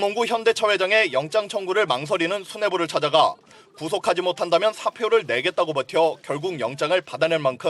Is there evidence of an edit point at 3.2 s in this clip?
no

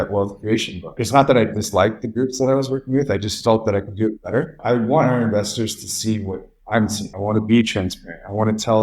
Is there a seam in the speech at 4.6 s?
yes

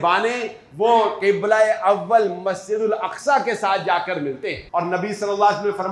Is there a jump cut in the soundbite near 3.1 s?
no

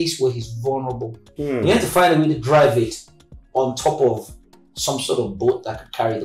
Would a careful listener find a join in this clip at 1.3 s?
yes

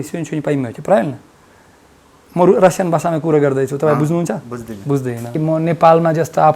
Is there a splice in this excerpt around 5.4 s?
yes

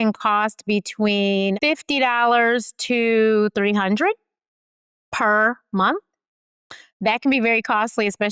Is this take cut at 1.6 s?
yes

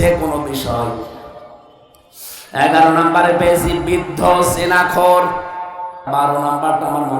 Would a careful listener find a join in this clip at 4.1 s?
no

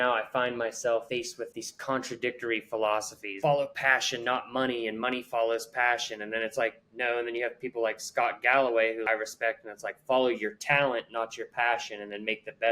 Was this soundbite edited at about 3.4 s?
yes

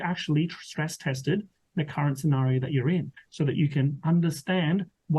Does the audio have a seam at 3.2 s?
yes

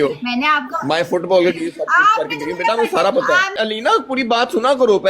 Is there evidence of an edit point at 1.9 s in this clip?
no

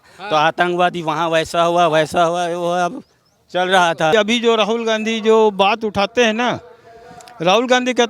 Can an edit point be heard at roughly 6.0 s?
no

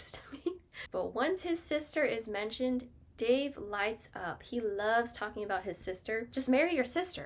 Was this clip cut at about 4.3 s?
no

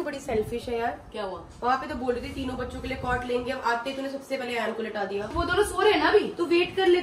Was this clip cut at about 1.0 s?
no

